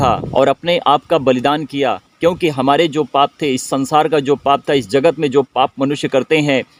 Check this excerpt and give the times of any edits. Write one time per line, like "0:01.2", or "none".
none